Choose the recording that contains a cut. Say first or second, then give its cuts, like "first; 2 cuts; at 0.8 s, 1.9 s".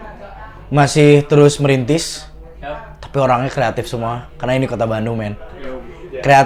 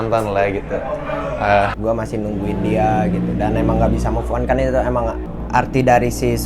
second; 2 cuts; at 1.8 s, 5.3 s